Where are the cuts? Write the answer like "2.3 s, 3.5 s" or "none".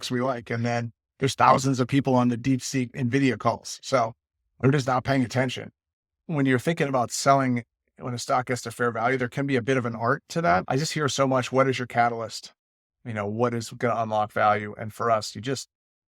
6.2 s, 10.6 s